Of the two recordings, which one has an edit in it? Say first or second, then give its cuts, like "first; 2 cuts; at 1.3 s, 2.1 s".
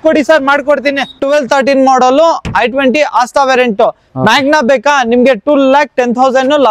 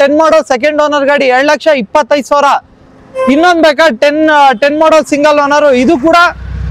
first; 1 cut; at 1.2 s